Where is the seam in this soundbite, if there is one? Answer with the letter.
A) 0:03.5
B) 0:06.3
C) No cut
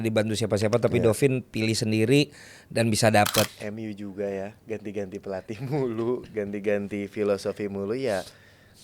A